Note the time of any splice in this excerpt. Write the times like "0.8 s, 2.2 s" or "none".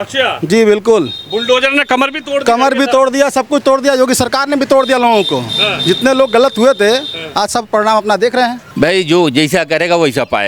8.6 s